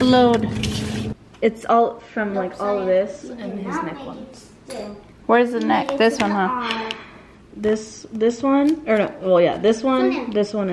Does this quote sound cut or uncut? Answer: cut